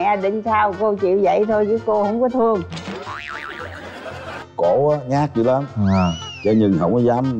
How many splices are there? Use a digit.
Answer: 2